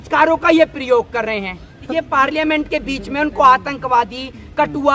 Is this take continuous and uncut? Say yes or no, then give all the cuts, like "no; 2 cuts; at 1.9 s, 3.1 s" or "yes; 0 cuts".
no; 1 cut; at 1.8 s